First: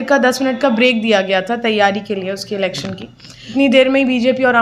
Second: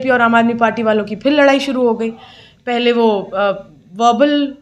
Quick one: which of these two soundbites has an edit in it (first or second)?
first